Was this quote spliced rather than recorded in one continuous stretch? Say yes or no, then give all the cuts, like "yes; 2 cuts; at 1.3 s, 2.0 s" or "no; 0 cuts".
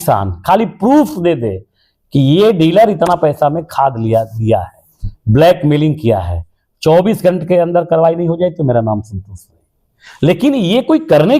no; 0 cuts